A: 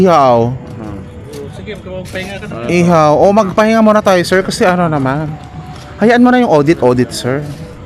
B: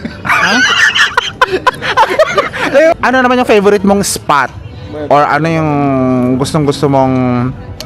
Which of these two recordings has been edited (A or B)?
B